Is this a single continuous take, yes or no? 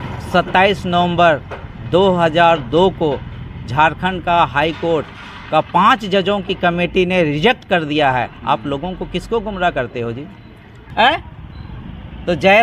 no